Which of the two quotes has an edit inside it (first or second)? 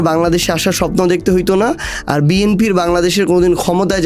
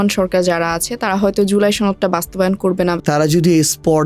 second